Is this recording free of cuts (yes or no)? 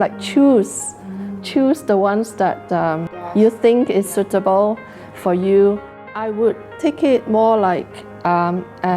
no